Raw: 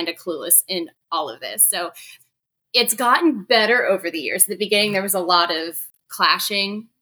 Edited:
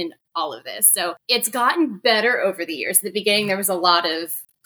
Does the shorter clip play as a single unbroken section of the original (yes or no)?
no